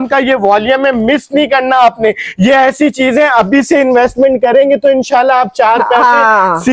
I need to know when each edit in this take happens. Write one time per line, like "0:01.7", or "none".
none